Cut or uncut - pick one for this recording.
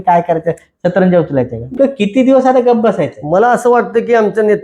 cut